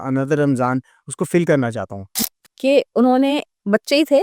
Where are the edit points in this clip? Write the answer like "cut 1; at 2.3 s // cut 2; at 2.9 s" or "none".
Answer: cut 1; at 2.1 s